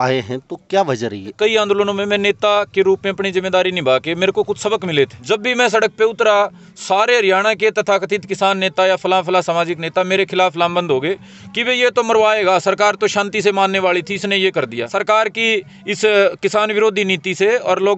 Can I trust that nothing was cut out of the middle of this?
no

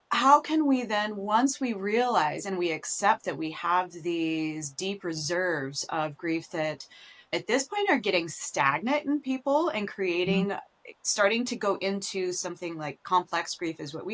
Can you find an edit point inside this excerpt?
yes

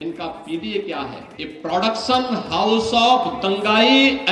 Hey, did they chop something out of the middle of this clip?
yes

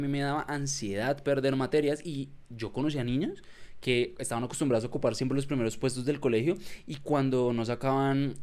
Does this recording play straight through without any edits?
yes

